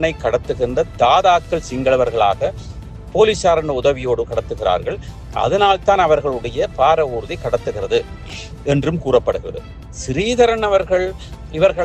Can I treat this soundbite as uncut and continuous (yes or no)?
no